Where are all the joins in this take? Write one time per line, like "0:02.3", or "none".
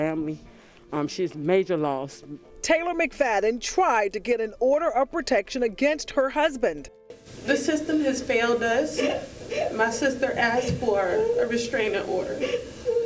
0:02.5